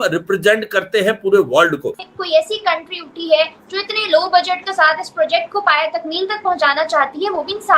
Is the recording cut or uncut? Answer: cut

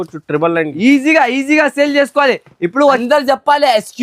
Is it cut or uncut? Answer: cut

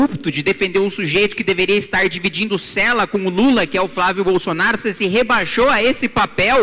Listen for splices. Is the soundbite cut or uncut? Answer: uncut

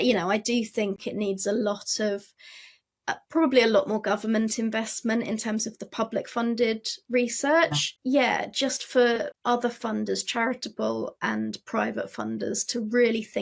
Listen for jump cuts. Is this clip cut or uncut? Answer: cut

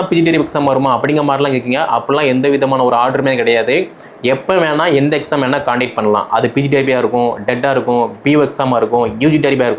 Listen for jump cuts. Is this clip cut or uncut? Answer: uncut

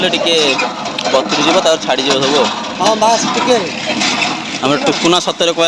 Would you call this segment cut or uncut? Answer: uncut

